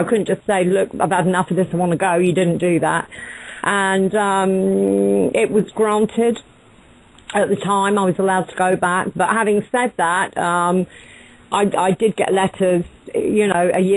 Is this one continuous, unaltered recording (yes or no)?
no